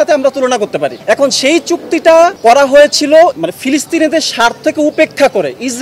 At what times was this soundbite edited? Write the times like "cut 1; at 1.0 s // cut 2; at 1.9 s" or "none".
cut 1; at 1.0 s // cut 2; at 2.4 s // cut 3; at 3.4 s

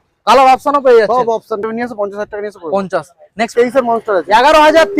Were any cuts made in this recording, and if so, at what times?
cut 1; at 1.6 s // cut 2; at 3.5 s

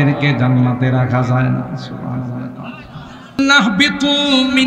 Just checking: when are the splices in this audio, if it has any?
cut 1; at 3.4 s

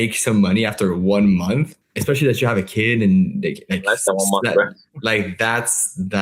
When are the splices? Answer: cut 1; at 1.8 s

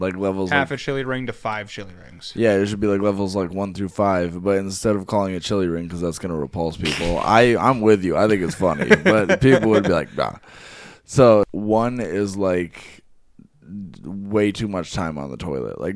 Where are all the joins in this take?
cut 1; at 11.5 s

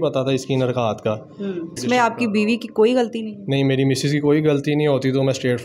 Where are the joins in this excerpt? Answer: cut 1; at 1.8 s

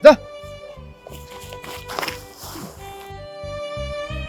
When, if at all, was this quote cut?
none

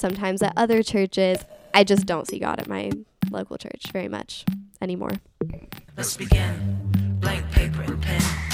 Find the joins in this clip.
cut 1; at 5.5 s

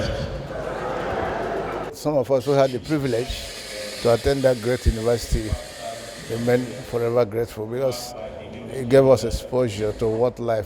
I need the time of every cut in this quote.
cut 1; at 1.8 s

